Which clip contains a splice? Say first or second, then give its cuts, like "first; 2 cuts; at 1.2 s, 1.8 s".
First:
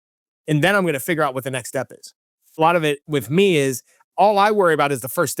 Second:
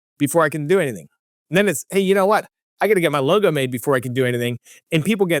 first; 1 cut; at 2.5 s